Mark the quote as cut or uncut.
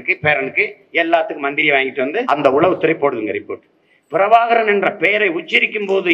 cut